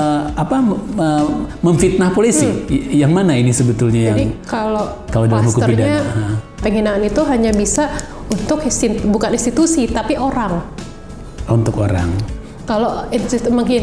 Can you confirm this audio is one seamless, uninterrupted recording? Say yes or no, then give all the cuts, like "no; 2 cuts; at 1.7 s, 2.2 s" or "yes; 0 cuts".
no; 2 cuts; at 6.6 s, 12.2 s